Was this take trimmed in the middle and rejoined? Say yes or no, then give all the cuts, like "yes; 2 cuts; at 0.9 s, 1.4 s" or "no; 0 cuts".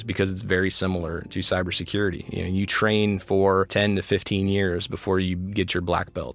no; 0 cuts